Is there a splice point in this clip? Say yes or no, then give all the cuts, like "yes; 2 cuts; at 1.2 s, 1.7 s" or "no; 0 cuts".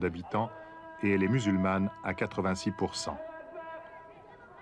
no; 0 cuts